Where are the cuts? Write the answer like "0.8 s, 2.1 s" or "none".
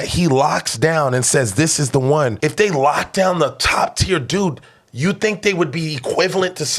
2.4 s